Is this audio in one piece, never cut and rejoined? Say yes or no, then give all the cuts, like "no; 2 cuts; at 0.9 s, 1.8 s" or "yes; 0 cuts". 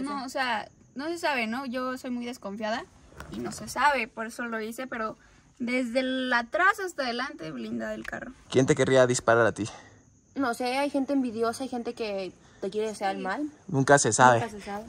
yes; 0 cuts